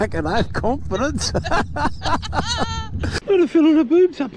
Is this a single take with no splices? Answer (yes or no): no